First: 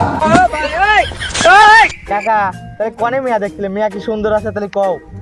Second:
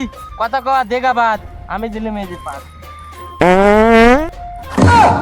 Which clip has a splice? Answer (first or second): first